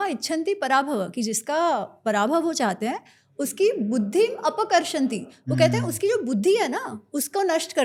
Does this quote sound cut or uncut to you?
uncut